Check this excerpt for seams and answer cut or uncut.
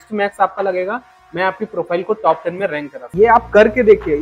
cut